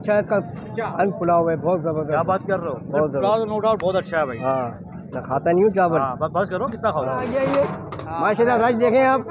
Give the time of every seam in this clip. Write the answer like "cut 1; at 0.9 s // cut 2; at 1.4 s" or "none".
cut 1; at 7.2 s